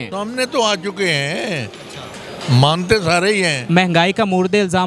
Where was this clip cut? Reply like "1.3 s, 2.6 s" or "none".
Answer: 3.6 s